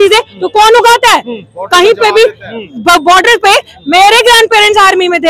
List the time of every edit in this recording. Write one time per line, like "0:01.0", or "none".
none